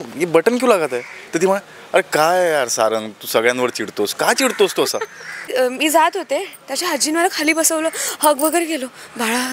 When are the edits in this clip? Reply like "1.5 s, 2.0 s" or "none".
5.5 s

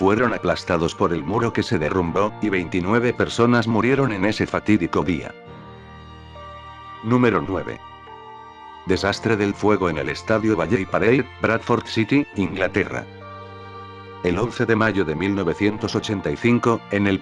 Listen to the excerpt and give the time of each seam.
14.4 s

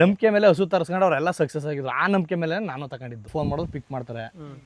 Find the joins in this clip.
3.3 s

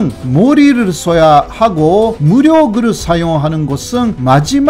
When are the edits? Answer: none

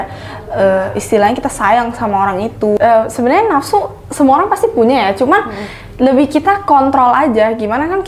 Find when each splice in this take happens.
2.8 s

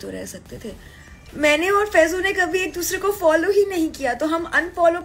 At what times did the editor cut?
none

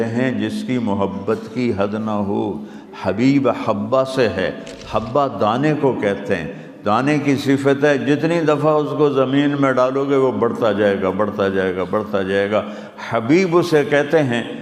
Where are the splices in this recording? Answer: none

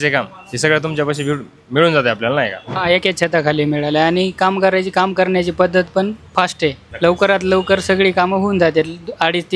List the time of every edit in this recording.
2.7 s, 6.9 s

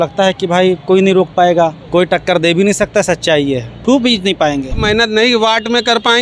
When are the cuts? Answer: 1.8 s, 3.7 s, 4.8 s

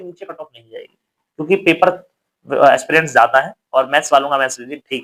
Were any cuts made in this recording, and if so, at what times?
none

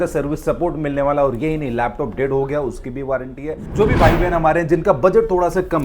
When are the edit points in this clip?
3.6 s

